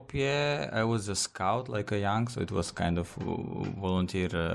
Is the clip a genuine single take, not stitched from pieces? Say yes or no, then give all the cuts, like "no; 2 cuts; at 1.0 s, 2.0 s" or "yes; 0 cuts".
yes; 0 cuts